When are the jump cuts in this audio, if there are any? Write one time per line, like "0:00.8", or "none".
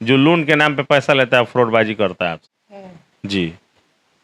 none